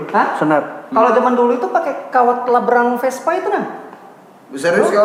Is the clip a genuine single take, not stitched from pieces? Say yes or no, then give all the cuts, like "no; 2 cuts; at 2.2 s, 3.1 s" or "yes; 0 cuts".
yes; 0 cuts